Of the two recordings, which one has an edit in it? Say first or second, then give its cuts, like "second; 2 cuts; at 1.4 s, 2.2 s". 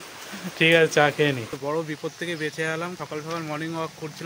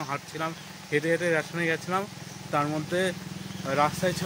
first; 2 cuts; at 1.5 s, 3.0 s